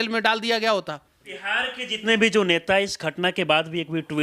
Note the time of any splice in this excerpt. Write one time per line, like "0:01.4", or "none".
0:01.4